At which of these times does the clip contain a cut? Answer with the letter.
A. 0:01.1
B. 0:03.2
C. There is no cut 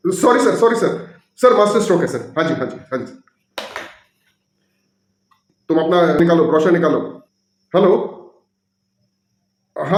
C